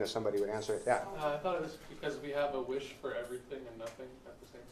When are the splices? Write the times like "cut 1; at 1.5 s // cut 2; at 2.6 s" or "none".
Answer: cut 1; at 3.3 s